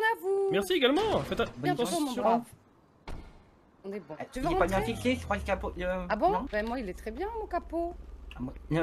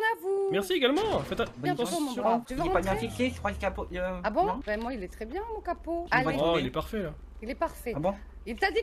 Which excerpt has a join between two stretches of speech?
second; 2 cuts; at 2.5 s, 6.0 s

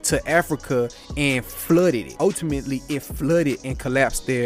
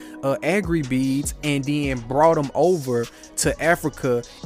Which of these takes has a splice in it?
first; 1 cut; at 2.2 s

